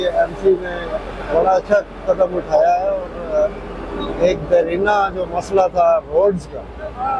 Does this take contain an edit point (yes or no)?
no